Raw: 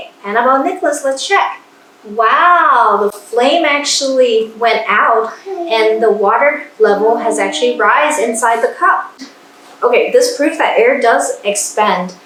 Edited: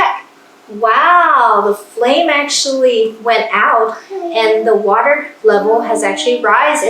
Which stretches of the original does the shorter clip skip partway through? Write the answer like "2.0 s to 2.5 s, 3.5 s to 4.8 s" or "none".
none